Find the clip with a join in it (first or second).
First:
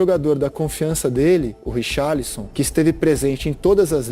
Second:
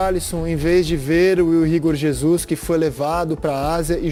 first